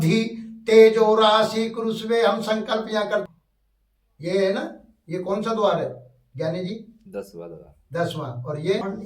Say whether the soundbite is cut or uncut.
cut